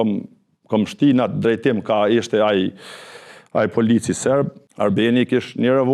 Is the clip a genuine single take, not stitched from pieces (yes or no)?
no